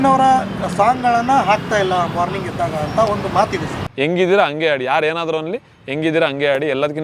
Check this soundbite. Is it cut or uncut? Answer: cut